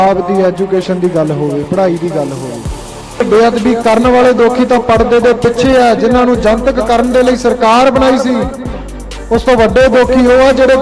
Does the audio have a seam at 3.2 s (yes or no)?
yes